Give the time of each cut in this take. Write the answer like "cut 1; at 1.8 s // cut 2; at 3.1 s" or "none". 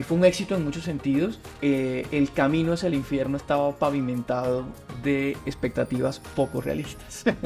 cut 1; at 1.5 s

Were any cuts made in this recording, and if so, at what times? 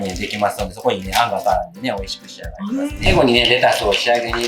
cut 1; at 3.1 s

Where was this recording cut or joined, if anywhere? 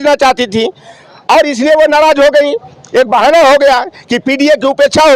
none

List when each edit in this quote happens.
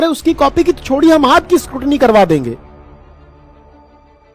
none

